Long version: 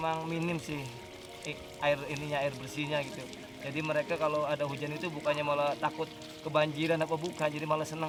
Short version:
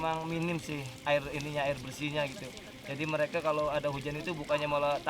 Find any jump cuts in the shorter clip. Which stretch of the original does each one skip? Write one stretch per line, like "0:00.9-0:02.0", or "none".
0:00.9-0:01.7